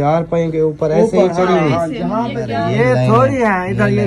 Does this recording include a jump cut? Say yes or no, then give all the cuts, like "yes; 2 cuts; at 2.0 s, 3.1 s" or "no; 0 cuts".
yes; 1 cut; at 2.5 s